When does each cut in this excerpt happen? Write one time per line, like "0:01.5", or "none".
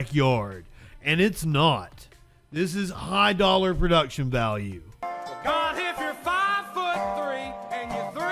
0:05.1